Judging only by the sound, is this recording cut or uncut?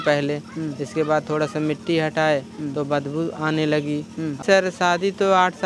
cut